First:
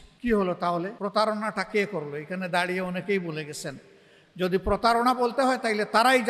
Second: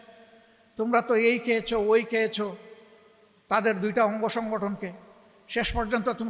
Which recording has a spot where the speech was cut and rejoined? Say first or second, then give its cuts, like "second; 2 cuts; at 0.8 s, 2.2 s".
first; 1 cut; at 0.9 s